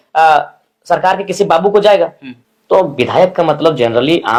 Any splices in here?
no; 0 cuts

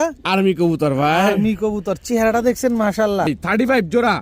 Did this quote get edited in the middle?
yes; 1 cut; at 3.3 s

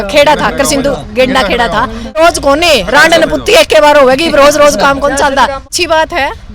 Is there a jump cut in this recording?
yes; 2 cuts; at 2.2 s, 5.7 s

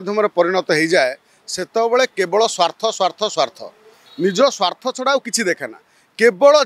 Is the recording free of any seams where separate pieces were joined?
yes; 0 cuts

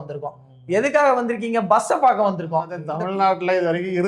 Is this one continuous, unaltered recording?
no; 1 cut; at 2.8 s

